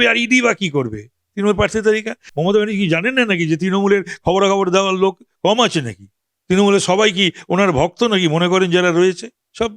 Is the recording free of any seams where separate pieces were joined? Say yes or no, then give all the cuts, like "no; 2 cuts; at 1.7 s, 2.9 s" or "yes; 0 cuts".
no; 1 cut; at 2.2 s